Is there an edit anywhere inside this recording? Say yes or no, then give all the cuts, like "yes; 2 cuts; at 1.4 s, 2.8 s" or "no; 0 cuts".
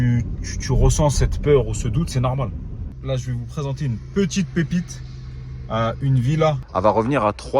yes; 2 cuts; at 3.0 s, 6.6 s